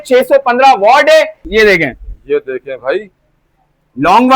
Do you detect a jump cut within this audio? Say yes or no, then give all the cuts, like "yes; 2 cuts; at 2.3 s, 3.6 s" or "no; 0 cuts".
yes; 1 cut; at 1.4 s